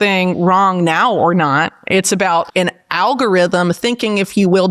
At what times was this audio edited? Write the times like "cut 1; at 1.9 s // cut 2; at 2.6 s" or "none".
cut 1; at 2.5 s

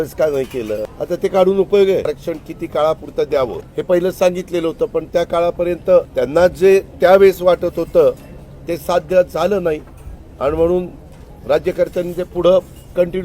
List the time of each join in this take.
cut 1; at 0.9 s // cut 2; at 2.1 s // cut 3; at 3.7 s // cut 4; at 6.1 s

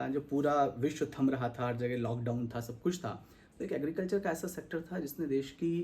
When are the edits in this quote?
none

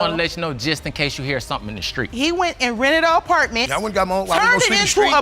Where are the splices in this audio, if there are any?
cut 1; at 2.1 s

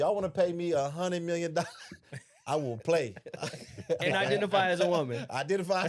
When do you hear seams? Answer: none

